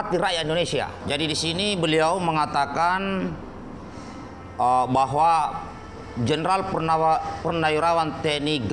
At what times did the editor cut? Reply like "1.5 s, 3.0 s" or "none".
1.0 s